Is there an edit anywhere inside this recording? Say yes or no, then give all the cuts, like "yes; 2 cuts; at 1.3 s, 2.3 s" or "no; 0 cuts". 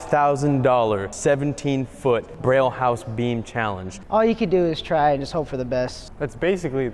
yes; 4 cuts; at 1.1 s, 2.3 s, 3.9 s, 6.0 s